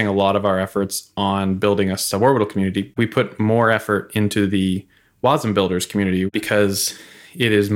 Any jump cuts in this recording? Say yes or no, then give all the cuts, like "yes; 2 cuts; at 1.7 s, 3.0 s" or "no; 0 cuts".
yes; 2 cuts; at 2.9 s, 6.3 s